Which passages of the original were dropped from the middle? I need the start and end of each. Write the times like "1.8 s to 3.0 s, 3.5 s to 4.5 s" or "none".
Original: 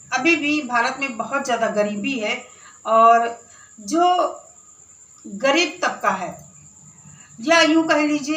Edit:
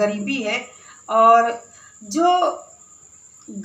none